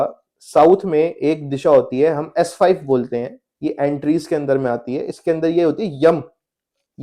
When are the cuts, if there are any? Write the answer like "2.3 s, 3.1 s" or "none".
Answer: none